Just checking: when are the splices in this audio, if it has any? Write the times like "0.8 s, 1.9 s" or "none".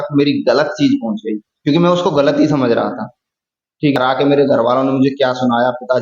4.0 s